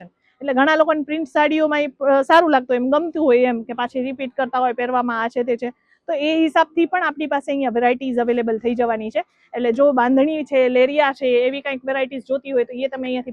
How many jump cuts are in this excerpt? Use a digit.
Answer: 0